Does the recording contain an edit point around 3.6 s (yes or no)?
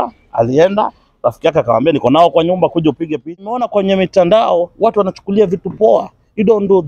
yes